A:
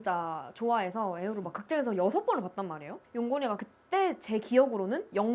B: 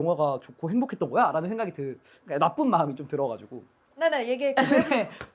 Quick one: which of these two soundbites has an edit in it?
B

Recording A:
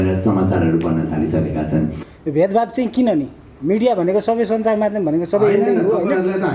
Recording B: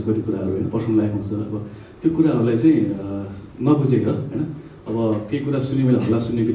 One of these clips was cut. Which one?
A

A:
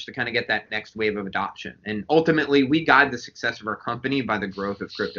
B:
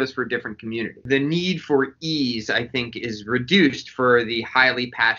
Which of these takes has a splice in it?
B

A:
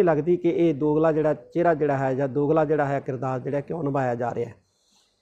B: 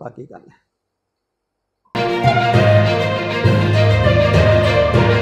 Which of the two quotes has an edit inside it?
B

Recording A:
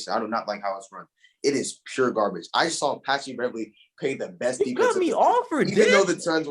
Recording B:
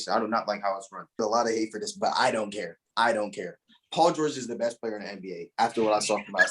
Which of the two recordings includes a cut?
B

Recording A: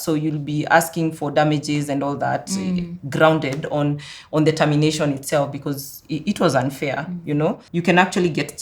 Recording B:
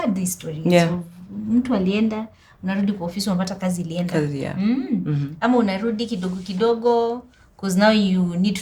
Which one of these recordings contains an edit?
A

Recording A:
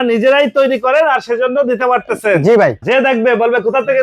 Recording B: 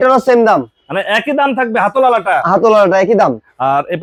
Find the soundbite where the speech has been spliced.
A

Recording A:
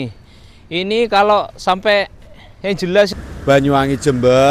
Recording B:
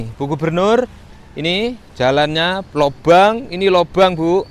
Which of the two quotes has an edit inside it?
A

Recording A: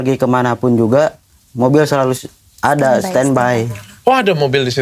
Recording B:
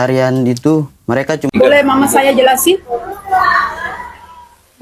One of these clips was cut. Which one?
B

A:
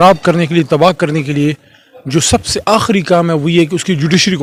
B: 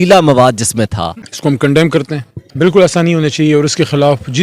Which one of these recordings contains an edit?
B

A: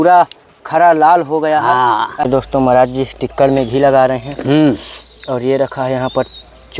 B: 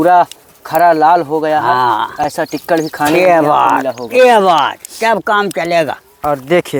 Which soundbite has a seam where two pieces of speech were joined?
A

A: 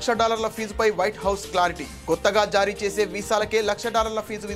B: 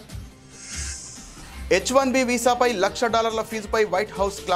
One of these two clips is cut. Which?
B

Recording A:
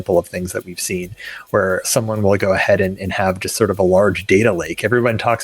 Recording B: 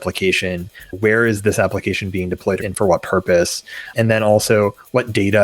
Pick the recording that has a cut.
B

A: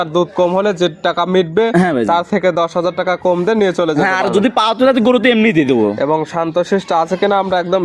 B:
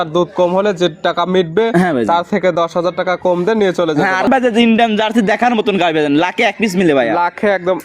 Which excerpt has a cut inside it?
B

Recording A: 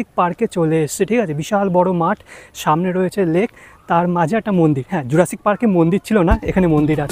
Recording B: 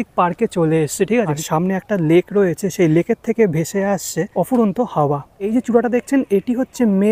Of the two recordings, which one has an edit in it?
B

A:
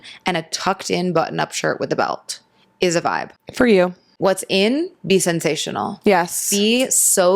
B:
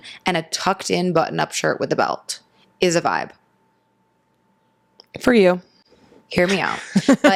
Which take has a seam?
A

